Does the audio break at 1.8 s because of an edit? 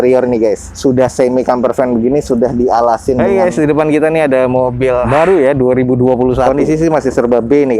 no; 2 cuts; at 3.2 s, 6.5 s

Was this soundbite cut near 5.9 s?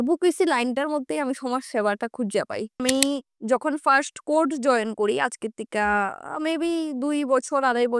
no; 1 cut; at 2.8 s

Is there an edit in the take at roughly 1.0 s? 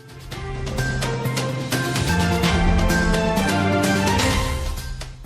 yes; 1 cut; at 1.0 s

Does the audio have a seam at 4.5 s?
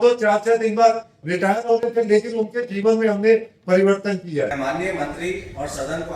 yes; 1 cut; at 4.5 s

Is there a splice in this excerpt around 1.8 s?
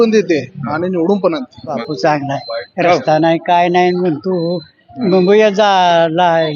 yes; 1 cut; at 1.8 s

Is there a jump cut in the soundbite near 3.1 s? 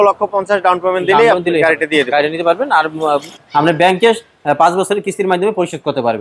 yes; 1 cut; at 3.1 s

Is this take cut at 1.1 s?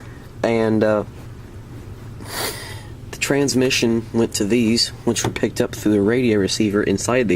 yes; 1 cut; at 1.1 s

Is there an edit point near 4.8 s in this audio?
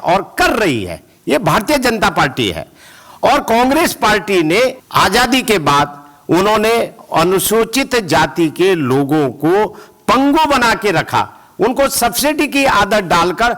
yes; 1 cut; at 4.8 s

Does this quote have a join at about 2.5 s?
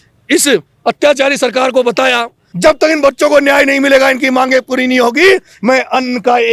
yes; 1 cut; at 2.5 s

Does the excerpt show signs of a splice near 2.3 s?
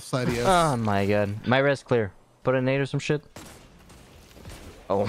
yes; 1 cut; at 2.3 s

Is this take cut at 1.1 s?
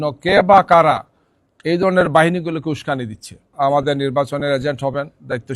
no; 1 cut; at 3.5 s

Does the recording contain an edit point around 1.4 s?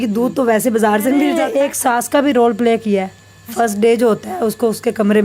yes; 1 cut; at 1.4 s

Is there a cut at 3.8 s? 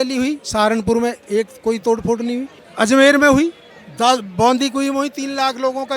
no; 1 cut; at 2.6 s

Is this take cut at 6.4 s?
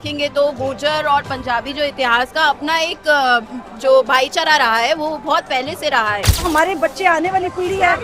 yes; 1 cut; at 6.4 s

